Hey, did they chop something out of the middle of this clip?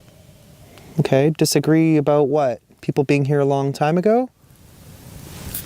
yes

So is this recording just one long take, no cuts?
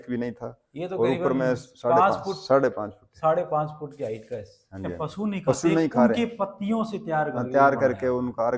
no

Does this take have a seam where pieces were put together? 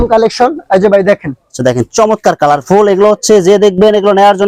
no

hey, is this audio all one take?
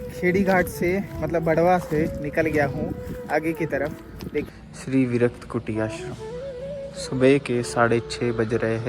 no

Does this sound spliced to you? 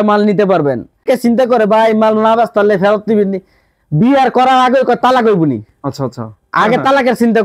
yes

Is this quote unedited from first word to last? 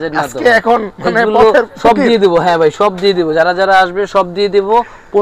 yes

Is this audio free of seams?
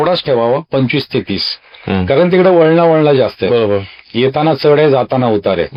yes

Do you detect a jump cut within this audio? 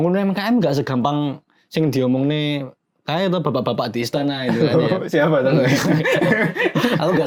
no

